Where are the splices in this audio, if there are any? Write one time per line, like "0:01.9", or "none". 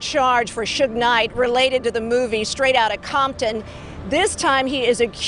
none